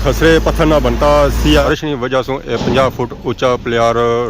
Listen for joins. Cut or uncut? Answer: cut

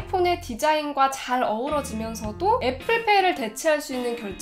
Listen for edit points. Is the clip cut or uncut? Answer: uncut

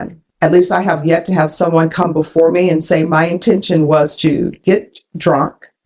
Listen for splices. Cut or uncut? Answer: uncut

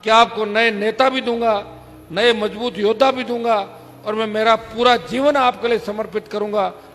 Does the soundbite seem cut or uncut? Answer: uncut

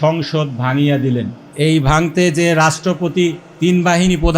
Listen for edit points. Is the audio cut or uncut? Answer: cut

